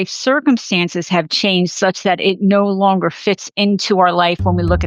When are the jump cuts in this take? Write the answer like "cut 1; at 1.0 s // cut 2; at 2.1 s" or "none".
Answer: none